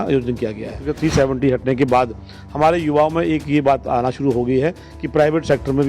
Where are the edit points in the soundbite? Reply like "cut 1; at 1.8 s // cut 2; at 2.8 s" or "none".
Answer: cut 1; at 0.9 s